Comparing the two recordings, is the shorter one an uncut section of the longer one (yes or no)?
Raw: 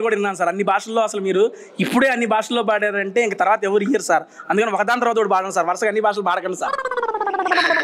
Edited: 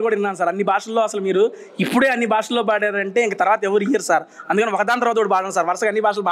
yes